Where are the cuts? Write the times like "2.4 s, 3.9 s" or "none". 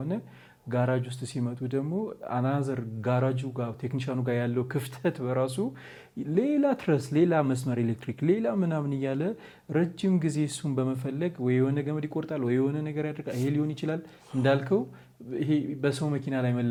none